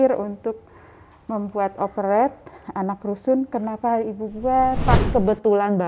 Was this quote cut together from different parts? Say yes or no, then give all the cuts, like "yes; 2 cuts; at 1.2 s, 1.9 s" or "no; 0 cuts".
yes; 1 cut; at 4.8 s